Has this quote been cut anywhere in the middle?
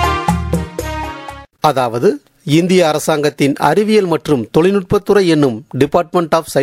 yes; 1 cut; at 1.4 s

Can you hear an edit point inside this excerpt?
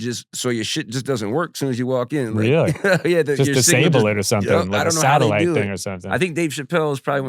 no; 0 cuts

